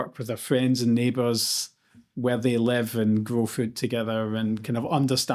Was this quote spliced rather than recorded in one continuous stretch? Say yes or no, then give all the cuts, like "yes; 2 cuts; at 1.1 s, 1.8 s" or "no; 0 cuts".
no; 0 cuts